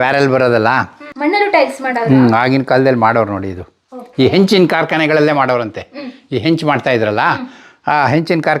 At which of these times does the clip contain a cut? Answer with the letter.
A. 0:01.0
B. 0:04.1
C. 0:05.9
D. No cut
A